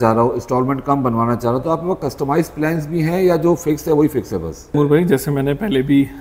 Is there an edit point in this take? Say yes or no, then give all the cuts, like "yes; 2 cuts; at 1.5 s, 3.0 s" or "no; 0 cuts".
yes; 1 cut; at 4.7 s